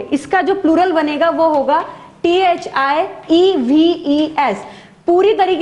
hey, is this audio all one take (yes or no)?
yes